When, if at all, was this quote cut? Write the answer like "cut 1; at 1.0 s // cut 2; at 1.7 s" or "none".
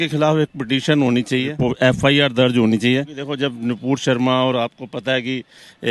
cut 1; at 1.6 s // cut 2; at 3.2 s